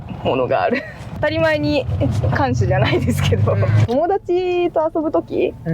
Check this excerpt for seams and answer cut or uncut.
cut